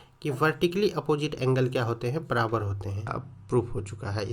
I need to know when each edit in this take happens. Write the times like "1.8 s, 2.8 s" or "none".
3.1 s